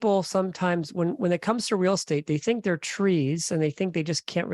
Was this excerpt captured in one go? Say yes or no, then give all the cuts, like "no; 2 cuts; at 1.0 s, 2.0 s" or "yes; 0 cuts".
yes; 0 cuts